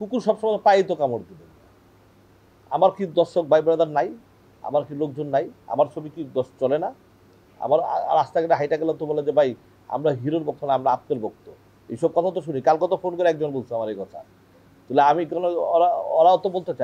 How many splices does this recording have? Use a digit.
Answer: 0